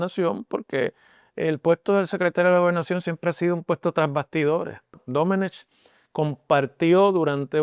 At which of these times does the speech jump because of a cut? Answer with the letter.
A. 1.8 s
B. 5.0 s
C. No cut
B